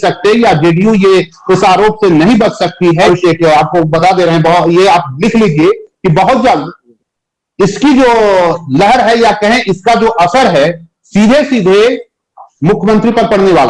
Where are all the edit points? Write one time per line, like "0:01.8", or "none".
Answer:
0:03.0